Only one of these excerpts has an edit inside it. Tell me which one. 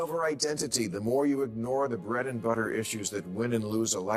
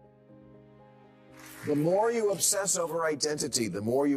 second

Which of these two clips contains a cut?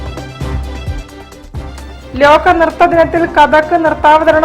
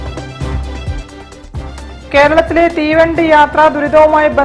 second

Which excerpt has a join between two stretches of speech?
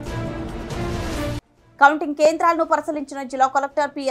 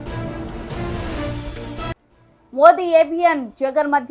second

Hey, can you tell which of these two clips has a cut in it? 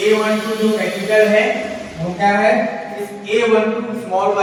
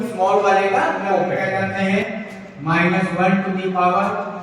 second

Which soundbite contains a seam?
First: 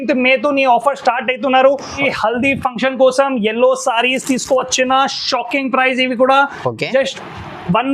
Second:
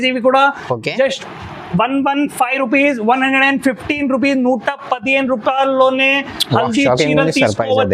first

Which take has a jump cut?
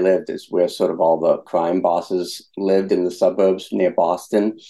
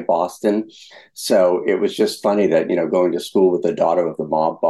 first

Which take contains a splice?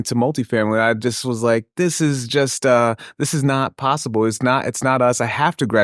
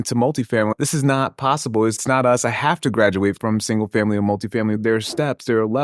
second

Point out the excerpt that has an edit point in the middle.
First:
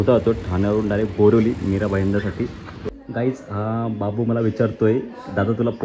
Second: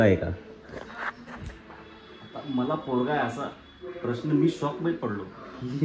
first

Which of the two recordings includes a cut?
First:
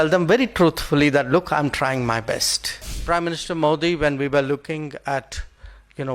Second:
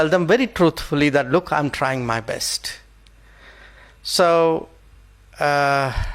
first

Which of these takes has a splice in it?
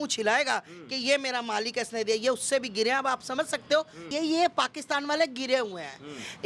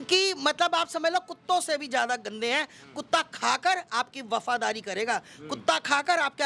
first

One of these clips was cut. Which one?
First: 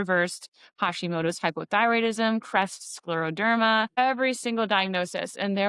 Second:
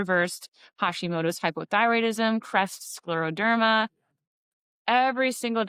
first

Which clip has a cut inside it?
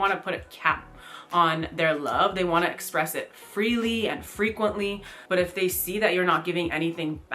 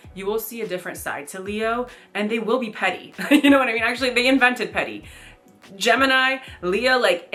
first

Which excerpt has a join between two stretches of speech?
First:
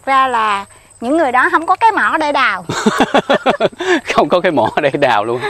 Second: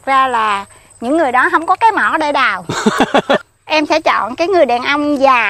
second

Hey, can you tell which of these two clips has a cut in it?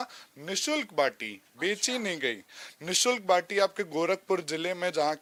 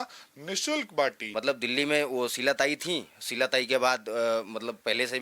second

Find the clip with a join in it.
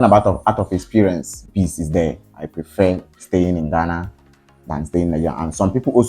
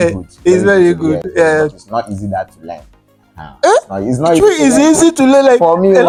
first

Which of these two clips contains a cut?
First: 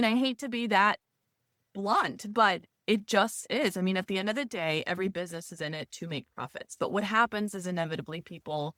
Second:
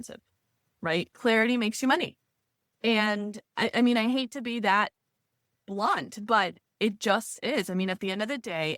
second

